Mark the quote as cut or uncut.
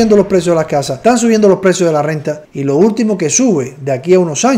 cut